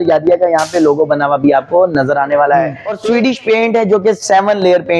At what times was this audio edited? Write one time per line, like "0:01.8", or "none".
0:02.9